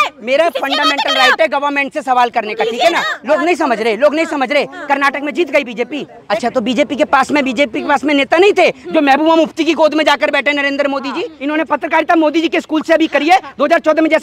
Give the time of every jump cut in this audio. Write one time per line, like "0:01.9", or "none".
0:03.1
0:06.1
0:11.4